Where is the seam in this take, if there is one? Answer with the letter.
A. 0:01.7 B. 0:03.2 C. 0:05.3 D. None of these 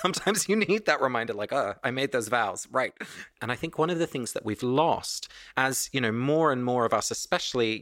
B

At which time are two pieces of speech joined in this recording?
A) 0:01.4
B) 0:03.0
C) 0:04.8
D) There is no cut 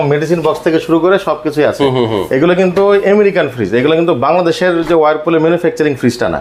D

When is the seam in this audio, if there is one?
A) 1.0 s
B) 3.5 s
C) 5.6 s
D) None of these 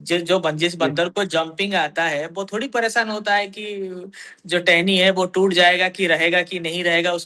D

